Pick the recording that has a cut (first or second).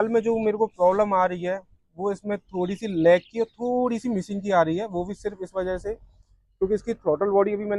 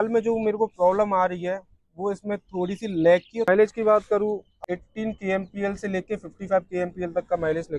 second